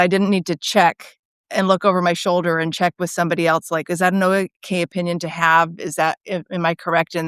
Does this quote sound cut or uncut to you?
uncut